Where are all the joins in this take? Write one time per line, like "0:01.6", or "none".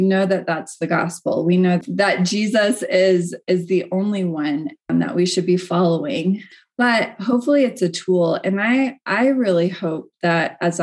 0:01.8
0:04.9